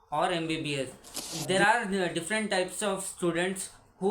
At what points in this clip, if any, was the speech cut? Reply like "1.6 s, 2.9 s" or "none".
1.5 s